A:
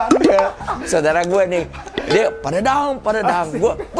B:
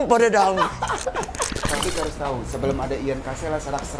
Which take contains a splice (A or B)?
B